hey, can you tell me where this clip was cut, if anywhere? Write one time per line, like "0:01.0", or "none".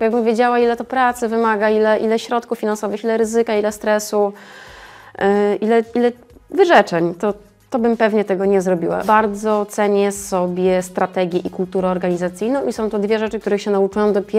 0:09.0